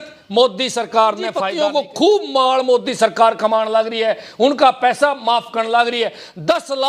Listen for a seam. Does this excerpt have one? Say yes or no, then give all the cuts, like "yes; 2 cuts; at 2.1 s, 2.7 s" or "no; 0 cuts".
yes; 1 cut; at 1.5 s